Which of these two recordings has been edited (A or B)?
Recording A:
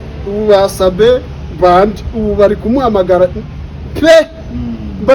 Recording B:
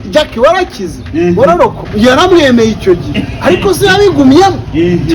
B